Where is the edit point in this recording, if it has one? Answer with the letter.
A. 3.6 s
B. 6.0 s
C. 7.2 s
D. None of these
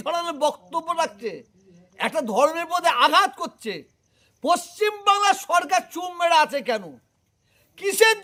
D